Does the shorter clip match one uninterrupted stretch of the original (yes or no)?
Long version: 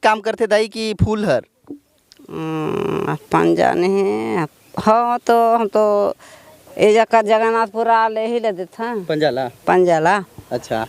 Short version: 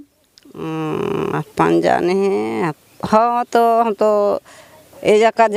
yes